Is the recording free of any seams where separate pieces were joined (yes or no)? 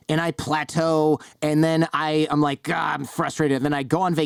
yes